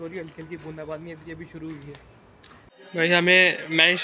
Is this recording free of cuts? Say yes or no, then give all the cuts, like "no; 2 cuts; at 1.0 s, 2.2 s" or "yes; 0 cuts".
no; 1 cut; at 2.7 s